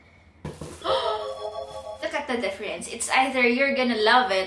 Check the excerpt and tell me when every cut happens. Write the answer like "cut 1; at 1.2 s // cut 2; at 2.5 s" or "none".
cut 1; at 2.0 s